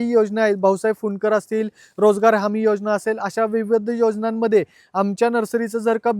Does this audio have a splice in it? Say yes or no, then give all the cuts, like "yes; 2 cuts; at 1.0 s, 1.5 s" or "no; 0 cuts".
no; 0 cuts